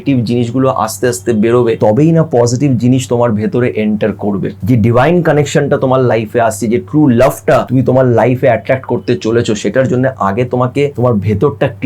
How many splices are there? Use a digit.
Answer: 4